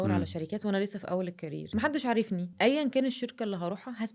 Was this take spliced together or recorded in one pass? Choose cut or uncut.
cut